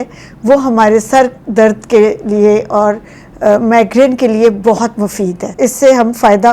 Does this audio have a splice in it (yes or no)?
yes